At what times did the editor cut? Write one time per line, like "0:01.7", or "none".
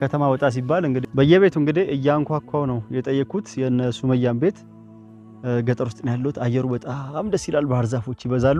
0:01.0